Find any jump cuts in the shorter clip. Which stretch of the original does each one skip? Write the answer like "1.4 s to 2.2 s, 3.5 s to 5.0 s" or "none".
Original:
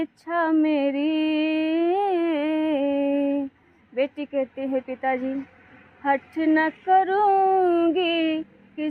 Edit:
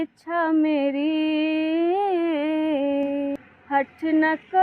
3.3 s to 5.7 s